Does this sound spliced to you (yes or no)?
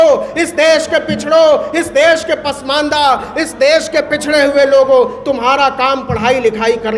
no